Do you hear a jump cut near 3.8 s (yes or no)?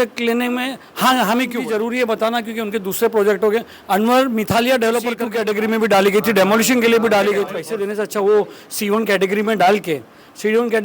no